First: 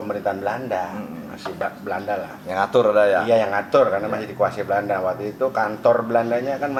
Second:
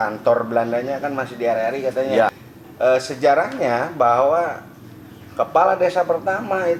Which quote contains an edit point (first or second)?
second